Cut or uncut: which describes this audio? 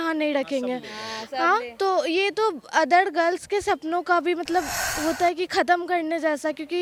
uncut